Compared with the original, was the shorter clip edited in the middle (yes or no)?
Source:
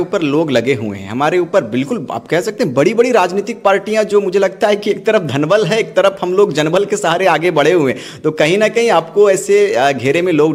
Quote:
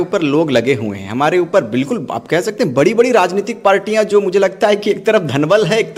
no